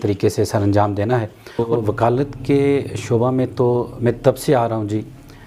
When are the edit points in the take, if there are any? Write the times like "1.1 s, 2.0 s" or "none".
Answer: 1.7 s